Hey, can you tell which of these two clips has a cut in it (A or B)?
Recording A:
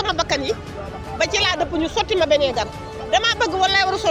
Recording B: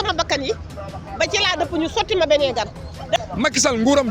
B